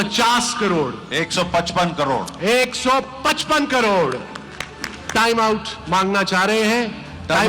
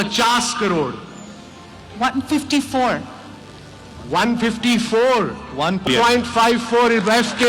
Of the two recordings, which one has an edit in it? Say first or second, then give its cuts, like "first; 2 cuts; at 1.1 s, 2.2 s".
first; 1 cut; at 1.0 s